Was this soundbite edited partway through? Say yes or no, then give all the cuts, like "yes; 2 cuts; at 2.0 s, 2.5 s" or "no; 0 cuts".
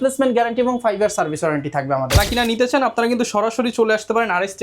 yes; 1 cut; at 2.2 s